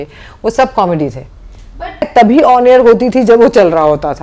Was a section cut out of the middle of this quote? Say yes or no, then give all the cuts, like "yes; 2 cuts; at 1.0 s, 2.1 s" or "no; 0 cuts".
yes; 1 cut; at 2.1 s